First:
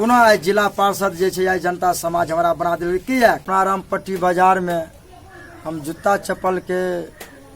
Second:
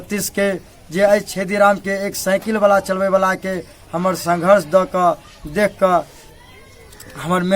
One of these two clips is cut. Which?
first; 1 cut; at 3.4 s

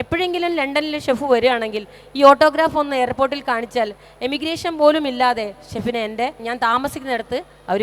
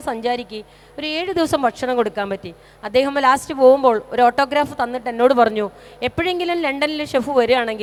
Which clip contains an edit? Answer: first; 1 cut; at 6.5 s

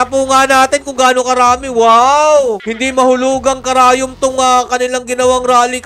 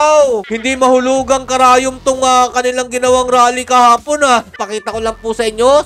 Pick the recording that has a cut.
second; 1 cut; at 4.6 s

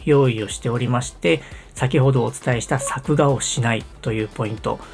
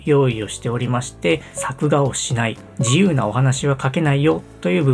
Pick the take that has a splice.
second; 2 cuts; at 1.7 s, 2.7 s

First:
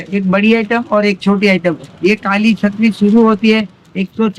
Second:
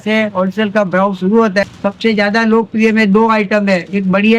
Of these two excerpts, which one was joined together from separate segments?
second; 1 cut; at 1.6 s

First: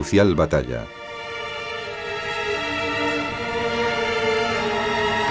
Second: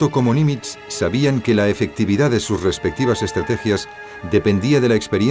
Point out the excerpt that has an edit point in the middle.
second; 1 cut; at 1.9 s

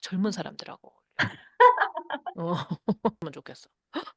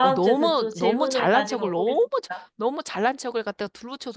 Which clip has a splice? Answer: first; 1 cut; at 3.2 s

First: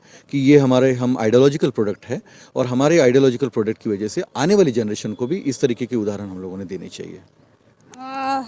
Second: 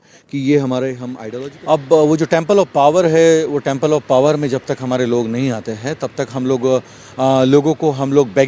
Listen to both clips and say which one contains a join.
second; 1 cut; at 1.1 s

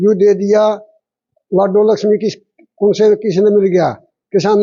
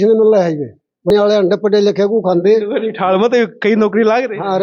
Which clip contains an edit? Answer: second; 1 cut; at 1.1 s

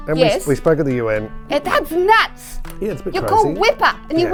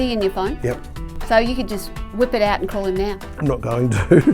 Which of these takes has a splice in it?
second; 2 cuts; at 1.0 s, 3.3 s

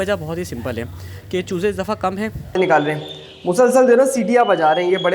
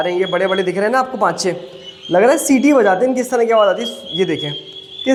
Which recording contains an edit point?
first; 1 cut; at 2.6 s

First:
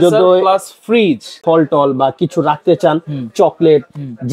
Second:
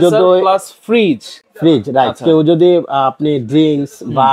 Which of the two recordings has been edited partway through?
first; 1 cut; at 1.3 s

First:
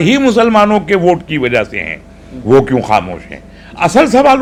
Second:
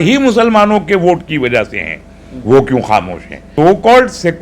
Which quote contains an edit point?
second; 1 cut; at 3.4 s

